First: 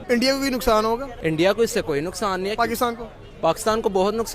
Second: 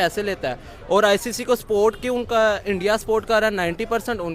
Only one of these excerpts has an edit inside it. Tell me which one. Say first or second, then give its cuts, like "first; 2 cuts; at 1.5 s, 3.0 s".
first; 1 cut; at 1.1 s